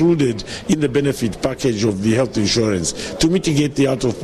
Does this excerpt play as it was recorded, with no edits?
yes; 0 cuts

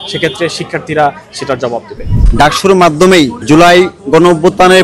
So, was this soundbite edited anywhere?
yes; 2 cuts; at 2.2 s, 3.4 s

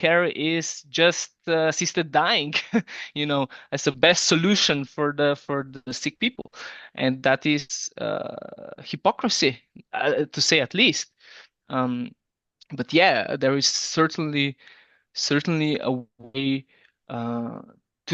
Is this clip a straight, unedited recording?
yes; 0 cuts

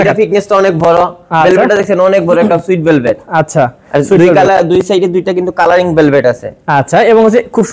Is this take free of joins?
yes; 0 cuts

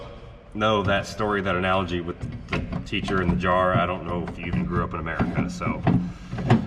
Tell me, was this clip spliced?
no; 0 cuts

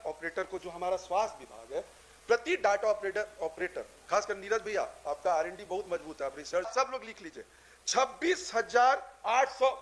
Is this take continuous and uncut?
no; 1 cut; at 6.7 s

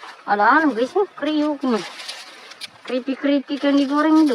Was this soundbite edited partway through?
no; 0 cuts

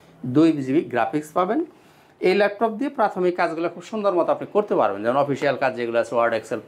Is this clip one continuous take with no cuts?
yes; 0 cuts

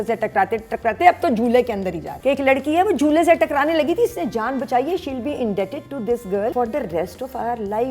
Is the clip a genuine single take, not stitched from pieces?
no; 2 cuts; at 2.1 s, 6.5 s

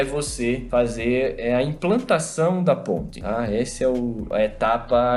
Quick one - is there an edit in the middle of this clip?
no; 0 cuts

